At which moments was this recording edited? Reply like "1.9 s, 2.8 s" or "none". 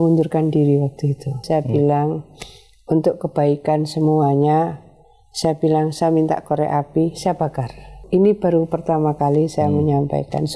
1.4 s, 8.0 s